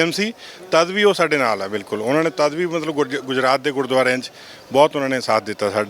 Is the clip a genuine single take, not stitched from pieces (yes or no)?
yes